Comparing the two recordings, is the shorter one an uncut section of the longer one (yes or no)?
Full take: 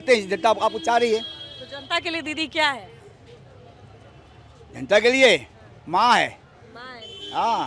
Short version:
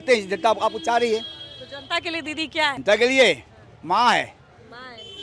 no